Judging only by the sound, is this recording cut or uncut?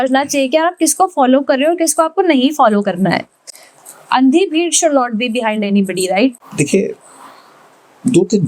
uncut